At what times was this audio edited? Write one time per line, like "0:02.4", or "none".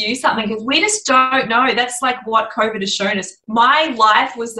0:03.4